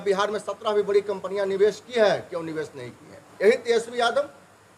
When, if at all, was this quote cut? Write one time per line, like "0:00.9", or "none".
0:03.3